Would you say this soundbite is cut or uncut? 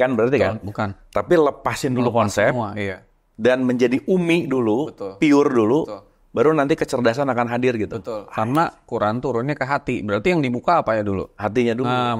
uncut